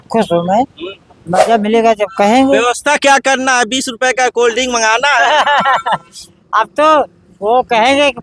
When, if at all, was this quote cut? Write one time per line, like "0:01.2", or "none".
0:01.4